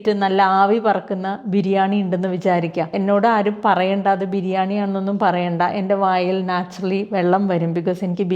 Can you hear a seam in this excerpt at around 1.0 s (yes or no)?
no